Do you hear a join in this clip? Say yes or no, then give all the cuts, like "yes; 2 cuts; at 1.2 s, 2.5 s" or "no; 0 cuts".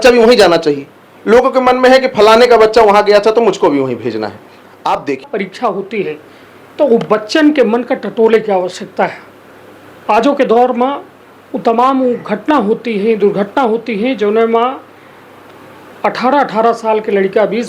yes; 1 cut; at 5.2 s